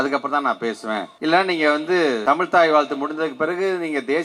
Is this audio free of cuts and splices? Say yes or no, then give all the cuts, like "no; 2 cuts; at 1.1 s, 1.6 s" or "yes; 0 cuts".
no; 2 cuts; at 1.1 s, 2.2 s